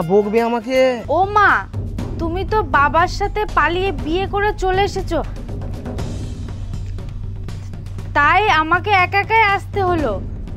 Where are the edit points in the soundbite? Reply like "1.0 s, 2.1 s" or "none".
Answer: 1.0 s

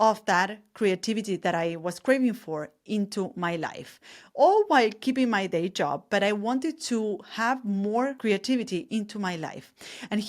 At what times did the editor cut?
8.2 s

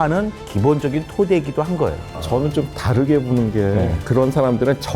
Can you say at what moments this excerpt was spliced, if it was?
2.0 s, 4.0 s

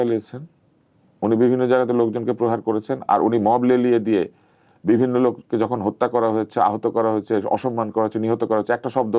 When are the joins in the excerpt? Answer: none

